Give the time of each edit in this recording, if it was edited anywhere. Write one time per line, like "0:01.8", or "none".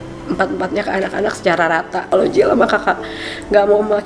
0:02.1